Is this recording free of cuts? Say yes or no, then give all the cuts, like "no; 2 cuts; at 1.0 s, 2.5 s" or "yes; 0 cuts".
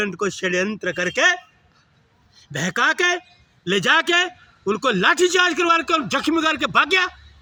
yes; 0 cuts